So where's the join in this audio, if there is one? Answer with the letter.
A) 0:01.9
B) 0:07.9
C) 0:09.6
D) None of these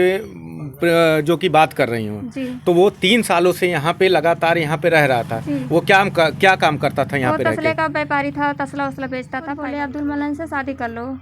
C